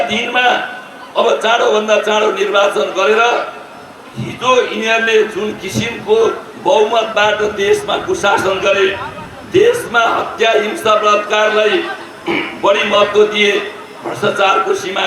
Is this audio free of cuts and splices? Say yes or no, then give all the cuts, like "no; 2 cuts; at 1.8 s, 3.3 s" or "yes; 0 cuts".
yes; 0 cuts